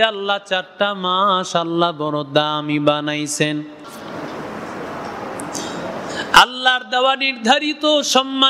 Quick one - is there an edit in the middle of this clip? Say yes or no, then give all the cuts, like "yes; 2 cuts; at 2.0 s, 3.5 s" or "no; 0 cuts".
yes; 1 cut; at 3.8 s